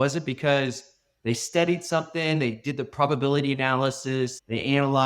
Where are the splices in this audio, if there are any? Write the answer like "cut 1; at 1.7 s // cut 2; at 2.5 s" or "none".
none